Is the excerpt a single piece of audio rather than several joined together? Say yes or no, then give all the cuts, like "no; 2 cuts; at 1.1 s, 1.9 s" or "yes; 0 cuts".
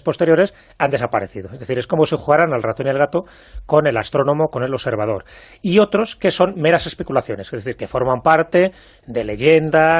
yes; 0 cuts